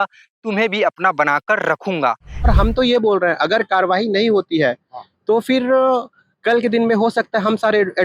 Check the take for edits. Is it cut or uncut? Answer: cut